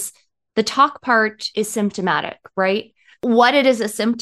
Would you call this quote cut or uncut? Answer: cut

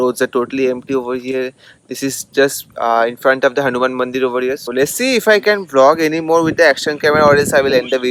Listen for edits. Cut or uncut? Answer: uncut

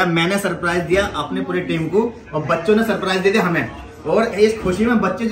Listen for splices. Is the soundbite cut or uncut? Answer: uncut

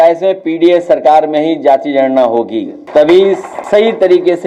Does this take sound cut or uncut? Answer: cut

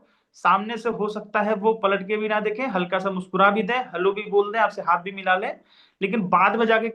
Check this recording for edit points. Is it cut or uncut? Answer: uncut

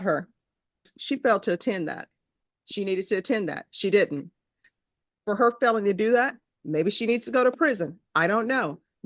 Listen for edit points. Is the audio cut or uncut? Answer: cut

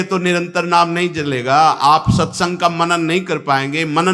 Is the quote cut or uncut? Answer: uncut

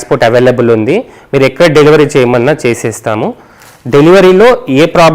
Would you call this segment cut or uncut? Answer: uncut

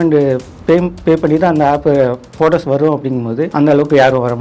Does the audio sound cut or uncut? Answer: cut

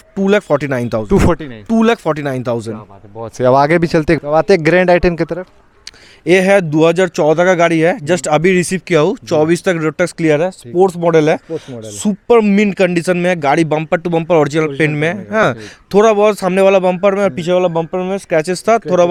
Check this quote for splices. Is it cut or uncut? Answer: uncut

